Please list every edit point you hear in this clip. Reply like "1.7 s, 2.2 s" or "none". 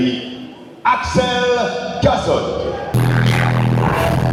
none